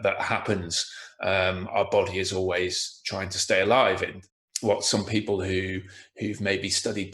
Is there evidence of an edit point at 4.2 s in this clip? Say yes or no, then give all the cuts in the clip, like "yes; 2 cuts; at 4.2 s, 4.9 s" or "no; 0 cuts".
yes; 1 cut; at 4.2 s